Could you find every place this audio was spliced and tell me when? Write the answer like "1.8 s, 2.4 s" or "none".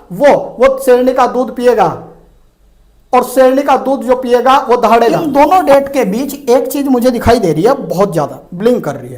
5.2 s